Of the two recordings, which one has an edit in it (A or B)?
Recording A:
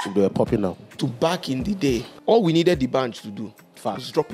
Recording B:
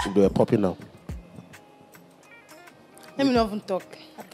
A